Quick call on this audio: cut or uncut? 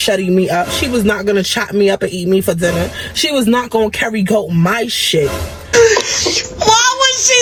uncut